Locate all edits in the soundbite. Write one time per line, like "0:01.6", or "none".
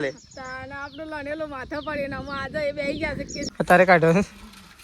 0:03.4